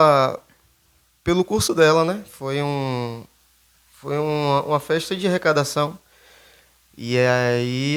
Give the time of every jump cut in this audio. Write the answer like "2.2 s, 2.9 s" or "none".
none